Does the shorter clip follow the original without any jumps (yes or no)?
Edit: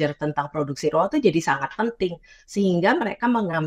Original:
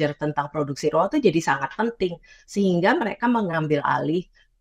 yes